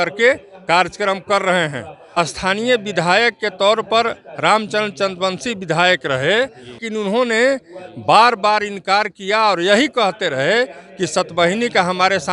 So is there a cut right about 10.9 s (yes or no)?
no